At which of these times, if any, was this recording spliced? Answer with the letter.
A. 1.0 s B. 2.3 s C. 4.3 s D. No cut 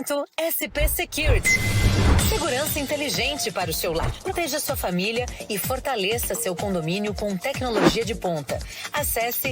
C